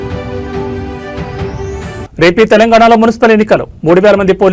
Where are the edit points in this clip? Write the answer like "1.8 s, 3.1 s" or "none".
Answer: 0.9 s